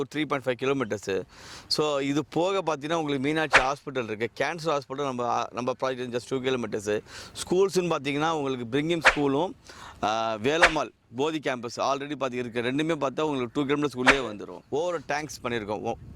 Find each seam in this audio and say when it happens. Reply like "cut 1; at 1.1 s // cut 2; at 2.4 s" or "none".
cut 1; at 14.5 s